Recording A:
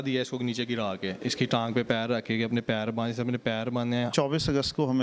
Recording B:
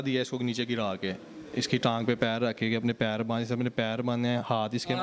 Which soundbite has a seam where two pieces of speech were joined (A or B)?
A